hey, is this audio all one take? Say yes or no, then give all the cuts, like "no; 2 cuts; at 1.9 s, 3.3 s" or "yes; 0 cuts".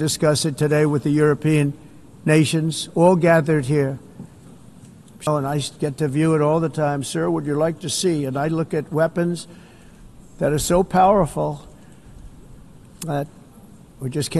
no; 1 cut; at 5.3 s